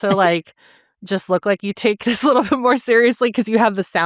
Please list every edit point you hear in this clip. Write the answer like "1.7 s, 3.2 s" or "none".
none